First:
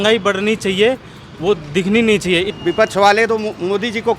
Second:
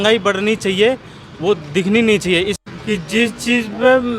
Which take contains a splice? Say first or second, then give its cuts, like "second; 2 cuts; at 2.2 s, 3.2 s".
first; 1 cut; at 2.5 s